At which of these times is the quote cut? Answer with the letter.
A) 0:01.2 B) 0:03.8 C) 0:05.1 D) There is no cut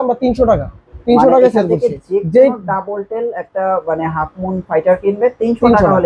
D